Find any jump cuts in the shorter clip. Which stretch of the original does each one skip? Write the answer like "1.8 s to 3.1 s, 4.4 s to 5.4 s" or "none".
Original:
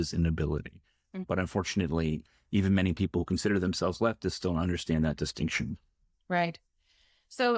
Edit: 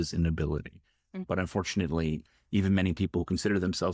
none